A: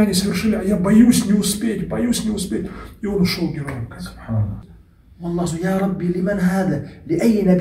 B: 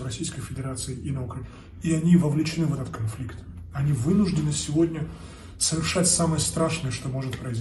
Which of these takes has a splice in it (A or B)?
A